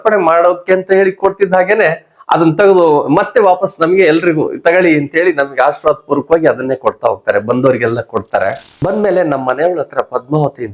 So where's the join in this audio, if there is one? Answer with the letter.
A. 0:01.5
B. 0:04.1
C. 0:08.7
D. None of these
C